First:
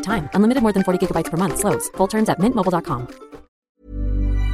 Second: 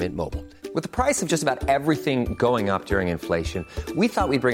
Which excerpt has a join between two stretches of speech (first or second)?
first